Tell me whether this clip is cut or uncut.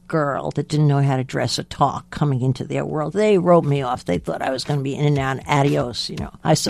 uncut